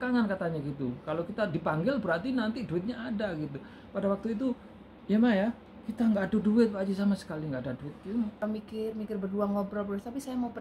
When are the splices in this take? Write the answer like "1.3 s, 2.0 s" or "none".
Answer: 8.4 s